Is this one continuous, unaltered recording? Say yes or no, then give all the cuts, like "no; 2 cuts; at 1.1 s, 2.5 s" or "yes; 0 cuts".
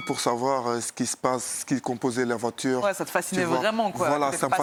yes; 0 cuts